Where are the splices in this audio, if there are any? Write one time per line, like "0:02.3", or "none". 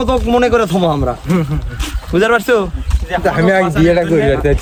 none